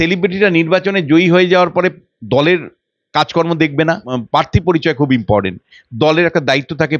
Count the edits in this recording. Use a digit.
1